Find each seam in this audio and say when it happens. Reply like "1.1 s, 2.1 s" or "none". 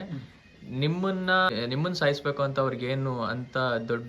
1.5 s